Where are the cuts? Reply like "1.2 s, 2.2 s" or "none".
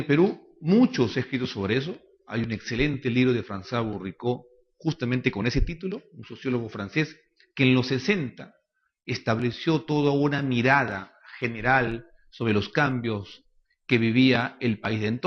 11.8 s